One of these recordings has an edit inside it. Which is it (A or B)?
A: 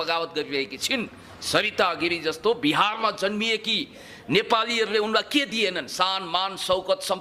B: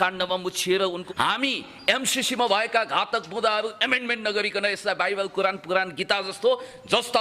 B